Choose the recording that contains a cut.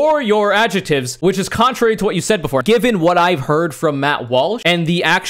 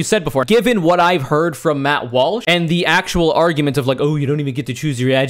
first; 1 cut; at 1.1 s

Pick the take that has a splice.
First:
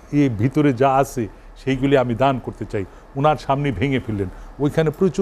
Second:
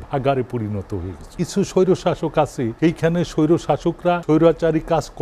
second; 3 cuts; at 1.2 s, 2.7 s, 4.2 s

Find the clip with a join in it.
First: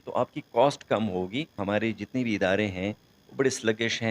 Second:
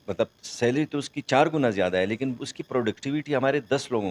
first; 1 cut; at 1.6 s

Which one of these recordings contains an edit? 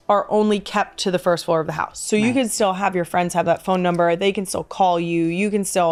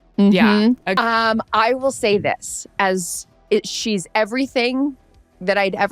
second; 1 cut; at 1.0 s

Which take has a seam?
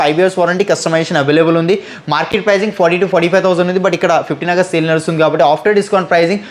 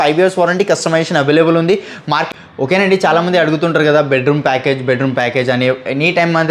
second; 1 cut; at 2.3 s

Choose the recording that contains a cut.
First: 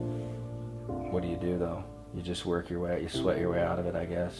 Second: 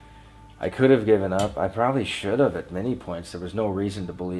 first; 1 cut; at 1.1 s

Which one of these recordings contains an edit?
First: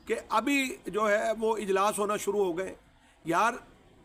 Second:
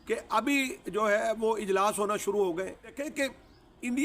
second; 1 cut; at 3.0 s

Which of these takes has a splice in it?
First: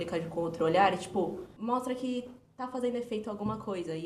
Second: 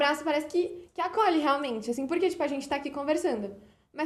first; 1 cut; at 1.5 s

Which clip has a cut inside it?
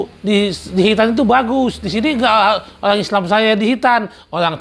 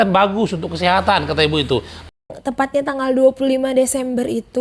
second; 1 cut; at 2.1 s

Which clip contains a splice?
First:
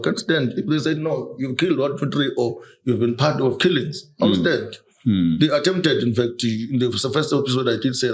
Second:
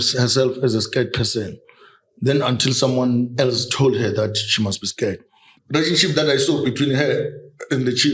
second; 1 cut; at 5.5 s

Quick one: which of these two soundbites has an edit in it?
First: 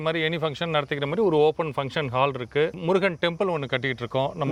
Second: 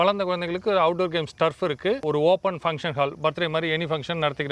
second; 1 cut; at 2.0 s

